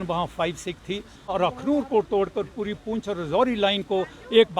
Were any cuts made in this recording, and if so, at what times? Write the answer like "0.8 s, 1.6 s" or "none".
1.3 s